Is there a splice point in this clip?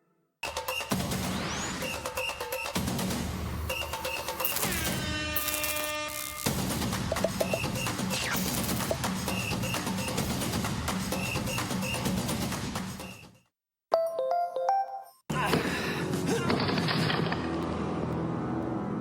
yes; 3 cuts; at 0.9 s, 10.1 s, 15.1 s

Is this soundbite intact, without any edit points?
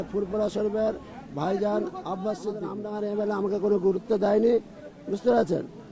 no; 1 cut; at 2.8 s

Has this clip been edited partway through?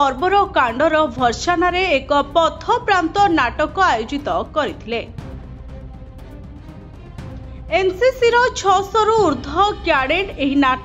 no; 0 cuts

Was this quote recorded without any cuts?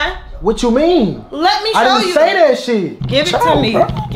no; 1 cut; at 3.0 s

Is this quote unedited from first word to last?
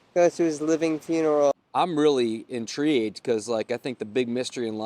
no; 1 cut; at 1.5 s

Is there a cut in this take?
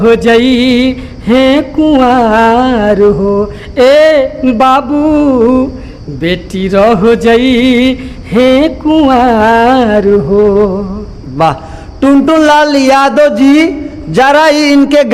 no; 0 cuts

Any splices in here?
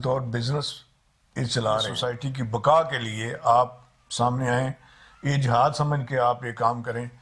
yes; 1 cut; at 1.9 s

